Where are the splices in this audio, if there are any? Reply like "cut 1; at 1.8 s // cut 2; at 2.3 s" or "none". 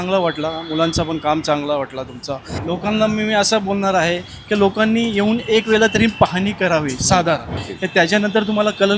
cut 1; at 2.5 s // cut 2; at 7.5 s

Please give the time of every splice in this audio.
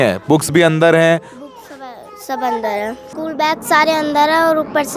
cut 1; at 3.1 s

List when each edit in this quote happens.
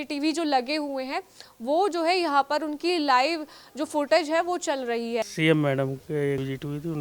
cut 1; at 5.3 s

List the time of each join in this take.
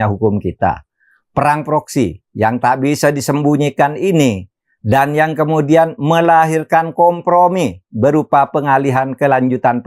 none

